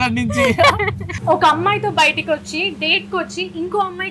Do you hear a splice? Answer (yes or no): yes